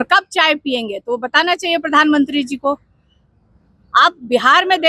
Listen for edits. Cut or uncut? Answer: uncut